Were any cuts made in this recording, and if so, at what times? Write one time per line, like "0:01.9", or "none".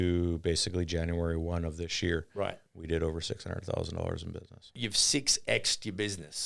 0:04.7